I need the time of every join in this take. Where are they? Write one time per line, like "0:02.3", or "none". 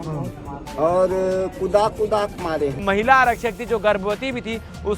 0:02.8